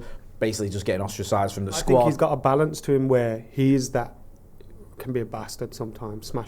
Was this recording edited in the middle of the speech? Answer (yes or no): yes